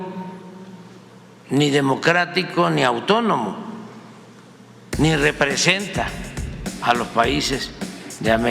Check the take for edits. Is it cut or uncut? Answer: uncut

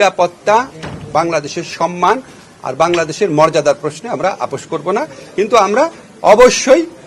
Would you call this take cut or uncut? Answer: uncut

